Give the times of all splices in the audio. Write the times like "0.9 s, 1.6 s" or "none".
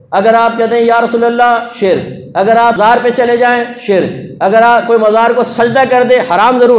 2.8 s